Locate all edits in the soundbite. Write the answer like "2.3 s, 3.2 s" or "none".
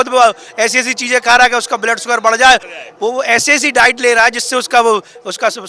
2.8 s